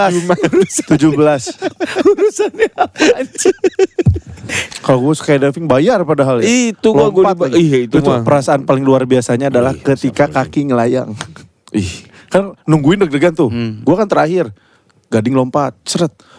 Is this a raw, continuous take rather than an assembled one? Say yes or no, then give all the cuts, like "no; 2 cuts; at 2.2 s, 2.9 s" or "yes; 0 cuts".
no; 1 cut; at 4.7 s